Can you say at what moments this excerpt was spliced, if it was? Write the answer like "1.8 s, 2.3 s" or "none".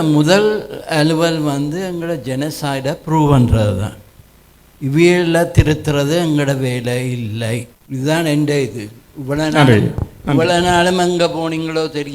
7.8 s